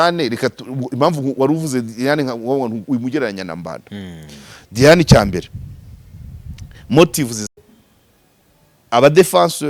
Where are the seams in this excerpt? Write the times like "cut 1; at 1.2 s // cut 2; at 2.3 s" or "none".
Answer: cut 1; at 7.6 s